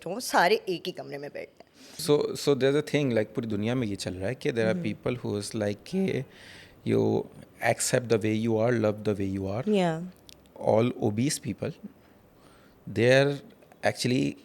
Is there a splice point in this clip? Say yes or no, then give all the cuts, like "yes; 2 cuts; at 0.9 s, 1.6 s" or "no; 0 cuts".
yes; 2 cuts; at 2.0 s, 10.6 s